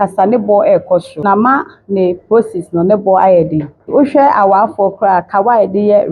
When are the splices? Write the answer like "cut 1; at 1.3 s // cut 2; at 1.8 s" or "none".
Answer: cut 1; at 1.2 s // cut 2; at 3.9 s

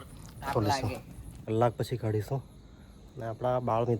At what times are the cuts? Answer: cut 1; at 1.4 s

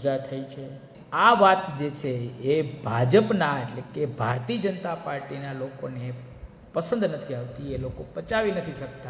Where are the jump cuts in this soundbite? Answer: cut 1; at 1.0 s

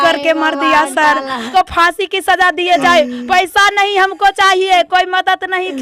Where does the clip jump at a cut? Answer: cut 1; at 1.4 s

